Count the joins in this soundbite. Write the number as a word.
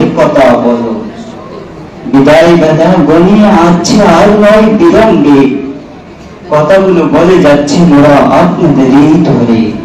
zero